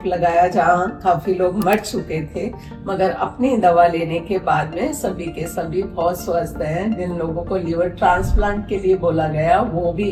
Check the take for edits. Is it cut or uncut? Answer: uncut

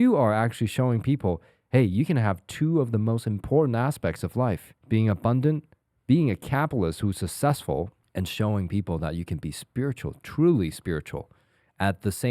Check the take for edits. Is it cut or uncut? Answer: cut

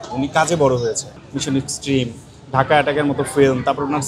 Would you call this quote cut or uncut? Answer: cut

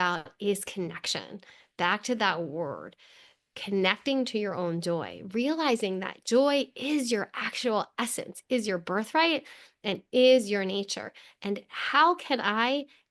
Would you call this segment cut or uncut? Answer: uncut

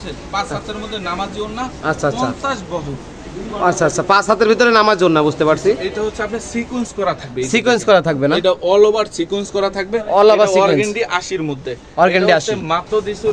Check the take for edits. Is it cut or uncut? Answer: uncut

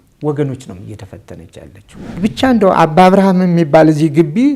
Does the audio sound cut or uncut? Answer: cut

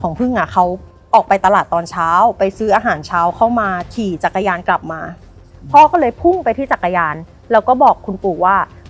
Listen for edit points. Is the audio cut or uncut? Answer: cut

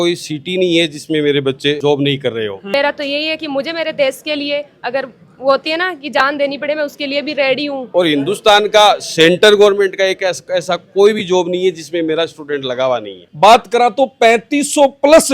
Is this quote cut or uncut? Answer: cut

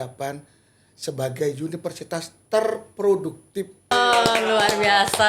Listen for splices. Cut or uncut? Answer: cut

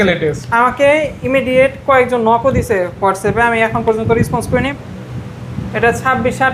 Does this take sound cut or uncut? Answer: cut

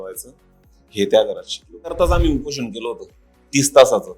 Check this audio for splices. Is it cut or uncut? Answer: cut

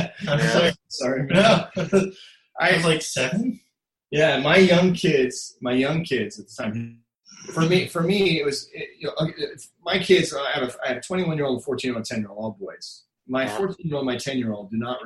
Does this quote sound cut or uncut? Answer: uncut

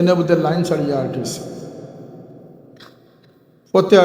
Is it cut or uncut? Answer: uncut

